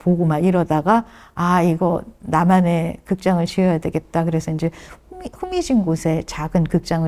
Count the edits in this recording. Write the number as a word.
zero